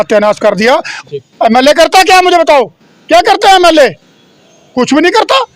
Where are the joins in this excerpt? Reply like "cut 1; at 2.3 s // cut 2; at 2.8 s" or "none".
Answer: cut 1; at 0.9 s